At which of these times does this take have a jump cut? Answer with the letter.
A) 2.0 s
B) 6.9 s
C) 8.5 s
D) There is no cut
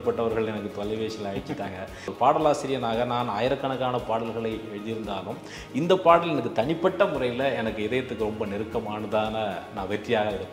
A